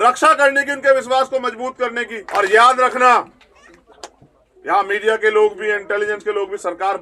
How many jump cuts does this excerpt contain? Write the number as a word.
one